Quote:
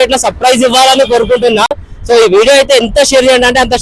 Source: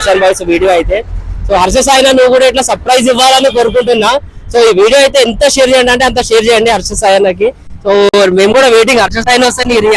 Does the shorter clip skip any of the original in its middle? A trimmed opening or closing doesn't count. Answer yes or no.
no